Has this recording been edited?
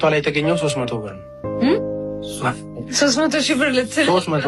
no; 0 cuts

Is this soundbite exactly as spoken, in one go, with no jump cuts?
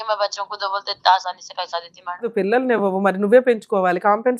no; 1 cut; at 2.3 s

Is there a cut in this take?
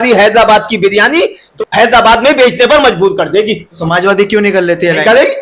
yes; 2 cuts; at 1.5 s, 3.7 s

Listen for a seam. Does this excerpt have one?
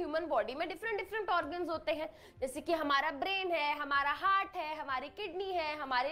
no; 0 cuts

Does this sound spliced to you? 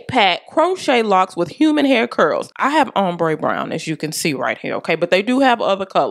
no; 0 cuts

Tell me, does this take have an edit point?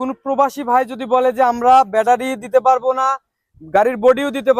no; 0 cuts

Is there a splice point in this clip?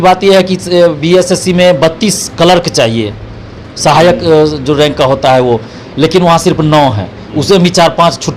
no; 0 cuts

